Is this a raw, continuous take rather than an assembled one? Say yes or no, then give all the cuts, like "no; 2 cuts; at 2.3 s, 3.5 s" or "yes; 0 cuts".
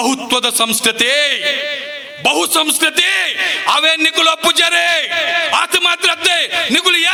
yes; 0 cuts